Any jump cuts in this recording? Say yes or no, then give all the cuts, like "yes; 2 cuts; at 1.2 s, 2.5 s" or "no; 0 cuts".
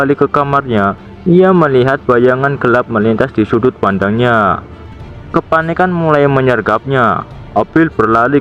no; 0 cuts